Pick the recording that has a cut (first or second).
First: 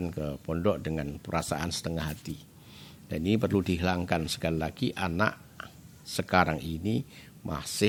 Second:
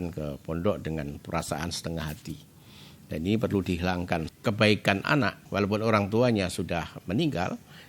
second